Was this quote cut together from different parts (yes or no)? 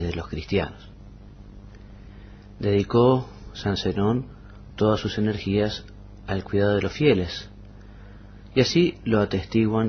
yes